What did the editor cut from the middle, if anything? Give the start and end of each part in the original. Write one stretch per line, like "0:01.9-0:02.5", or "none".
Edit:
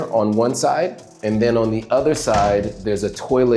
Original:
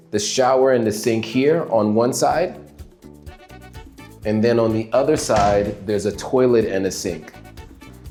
0:02.7-0:04.1